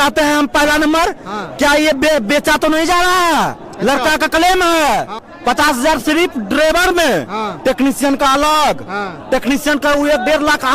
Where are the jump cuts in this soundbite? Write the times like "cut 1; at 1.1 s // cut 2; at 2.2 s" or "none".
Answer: cut 1; at 5.2 s